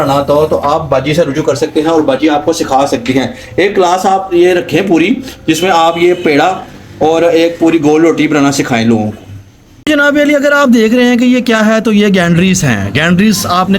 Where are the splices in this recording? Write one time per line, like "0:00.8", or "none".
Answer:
0:09.9